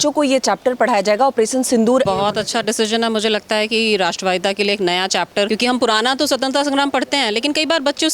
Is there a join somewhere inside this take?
yes; 2 cuts; at 2.1 s, 5.5 s

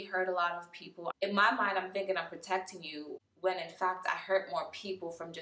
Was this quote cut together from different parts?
yes; 1 cut; at 1.1 s

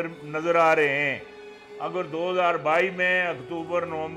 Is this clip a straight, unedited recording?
yes; 0 cuts

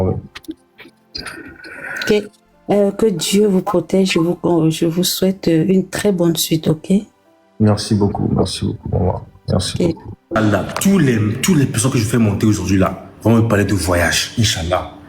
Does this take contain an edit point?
yes; 1 cut; at 10.4 s

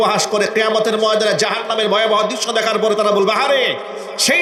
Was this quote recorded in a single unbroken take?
yes; 0 cuts

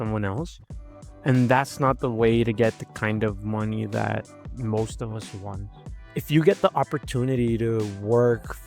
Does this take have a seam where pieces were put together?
yes; 1 cut; at 6.0 s

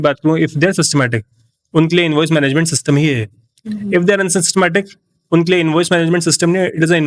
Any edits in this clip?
no; 0 cuts

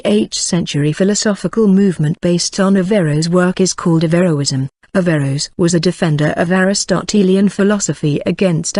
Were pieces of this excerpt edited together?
yes; 1 cut; at 2.5 s

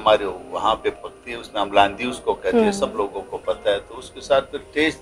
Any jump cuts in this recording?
no; 0 cuts

